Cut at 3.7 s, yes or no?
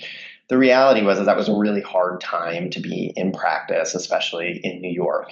no